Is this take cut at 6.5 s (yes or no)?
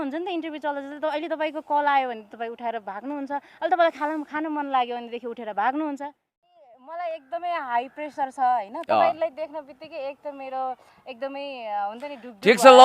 yes